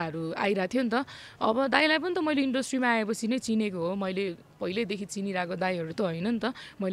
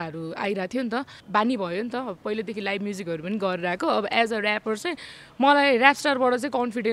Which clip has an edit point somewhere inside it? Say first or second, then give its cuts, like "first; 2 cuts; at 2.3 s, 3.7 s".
second; 1 cut; at 1.2 s